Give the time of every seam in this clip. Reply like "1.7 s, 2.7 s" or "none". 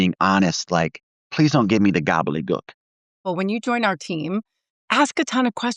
3.2 s